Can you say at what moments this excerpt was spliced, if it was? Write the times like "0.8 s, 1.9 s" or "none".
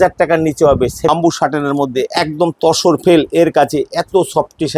1.1 s